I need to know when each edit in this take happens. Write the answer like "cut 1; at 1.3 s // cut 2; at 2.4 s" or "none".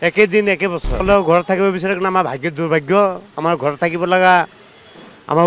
cut 1; at 1.0 s